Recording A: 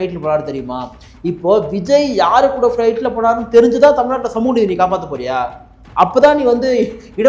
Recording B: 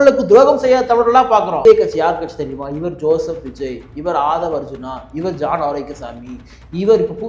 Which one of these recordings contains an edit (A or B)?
B